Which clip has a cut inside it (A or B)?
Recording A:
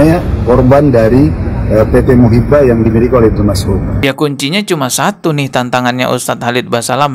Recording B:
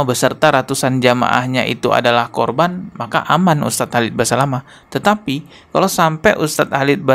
A